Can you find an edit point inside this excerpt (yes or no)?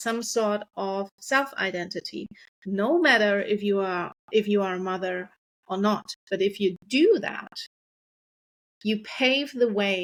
no